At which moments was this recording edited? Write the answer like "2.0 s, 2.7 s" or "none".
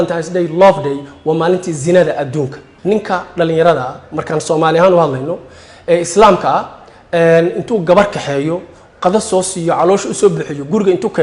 2.7 s